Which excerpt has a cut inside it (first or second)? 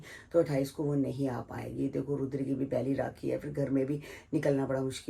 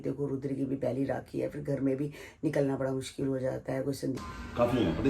second